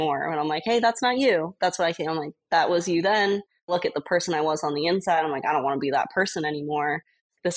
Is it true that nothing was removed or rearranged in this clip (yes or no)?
no